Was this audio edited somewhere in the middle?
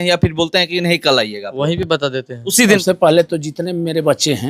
yes; 1 cut; at 2.8 s

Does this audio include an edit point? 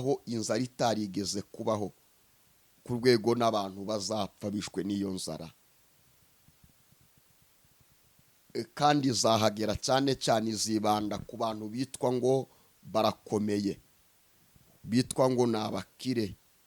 no; 0 cuts

